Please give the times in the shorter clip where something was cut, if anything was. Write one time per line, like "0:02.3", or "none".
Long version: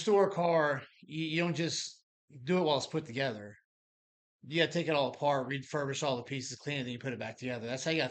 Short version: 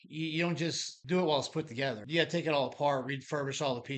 0:00.9
0:02.0